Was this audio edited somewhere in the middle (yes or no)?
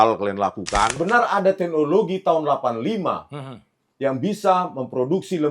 yes